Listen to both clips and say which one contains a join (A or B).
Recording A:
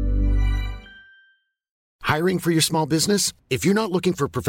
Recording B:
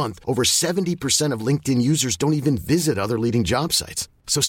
A